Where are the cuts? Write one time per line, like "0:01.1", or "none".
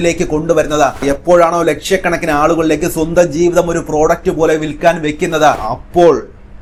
none

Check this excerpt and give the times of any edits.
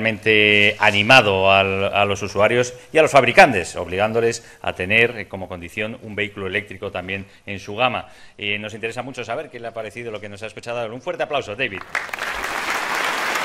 none

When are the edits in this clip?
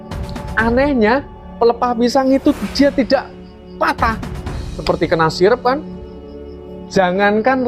0:04.8

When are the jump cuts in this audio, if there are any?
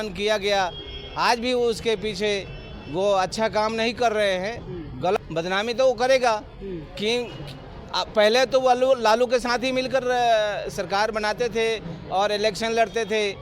0:05.2

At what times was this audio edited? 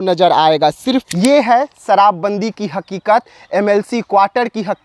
0:01.1

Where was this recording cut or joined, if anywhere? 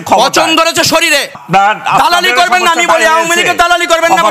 0:01.4

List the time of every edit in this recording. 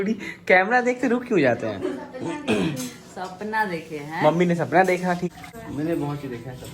0:05.3

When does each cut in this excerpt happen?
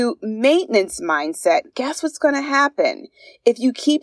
none

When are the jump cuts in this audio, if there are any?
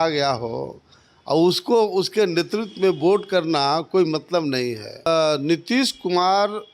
0:04.9

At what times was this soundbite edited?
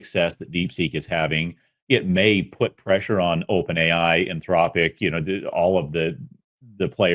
none

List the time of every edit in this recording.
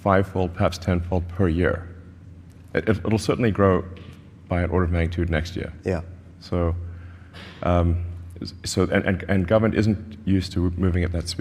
none

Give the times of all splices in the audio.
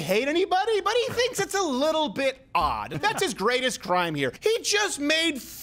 0:02.9
0:04.4

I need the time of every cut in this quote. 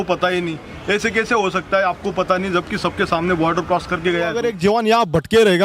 0:04.4

